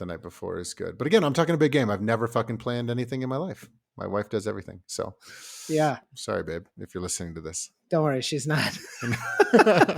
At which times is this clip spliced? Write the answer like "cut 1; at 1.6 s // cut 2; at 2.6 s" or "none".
cut 1; at 6.0 s